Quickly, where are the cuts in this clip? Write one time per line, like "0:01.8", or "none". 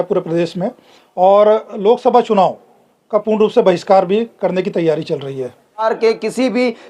0:05.9

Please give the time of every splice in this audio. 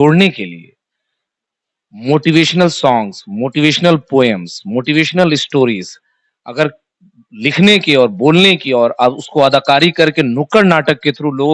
none

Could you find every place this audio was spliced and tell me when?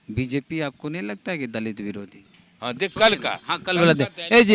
0:02.5

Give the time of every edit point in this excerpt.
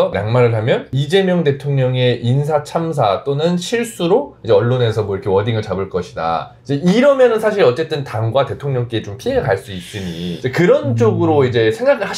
none

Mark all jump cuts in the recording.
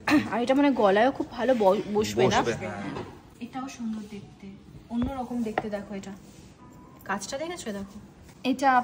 none

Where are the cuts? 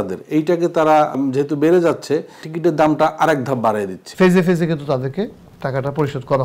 0:01.1
0:02.4
0:04.0

